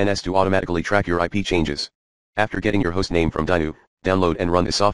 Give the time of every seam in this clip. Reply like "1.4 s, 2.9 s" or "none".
none